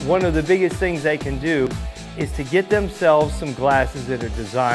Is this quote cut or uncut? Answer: cut